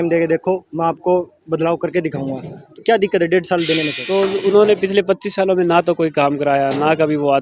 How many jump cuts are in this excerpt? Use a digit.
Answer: 1